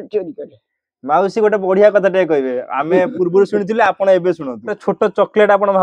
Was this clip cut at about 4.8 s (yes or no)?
yes